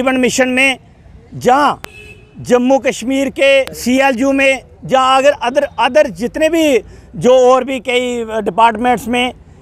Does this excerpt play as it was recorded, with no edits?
no; 1 cut; at 3.7 s

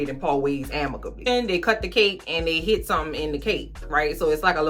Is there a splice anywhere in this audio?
yes; 1 cut; at 1.3 s

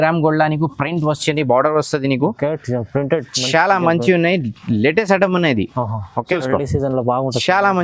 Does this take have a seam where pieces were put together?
yes; 1 cut; at 6.4 s

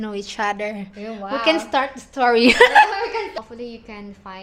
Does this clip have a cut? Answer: yes; 1 cut; at 3.3 s

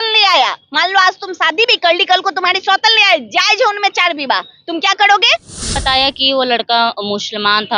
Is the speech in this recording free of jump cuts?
no; 1 cut; at 5.6 s

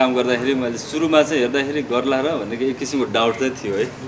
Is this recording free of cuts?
yes; 0 cuts

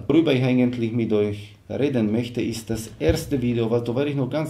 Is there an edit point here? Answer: no; 0 cuts

